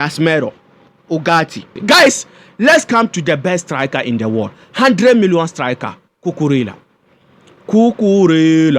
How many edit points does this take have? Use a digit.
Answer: 1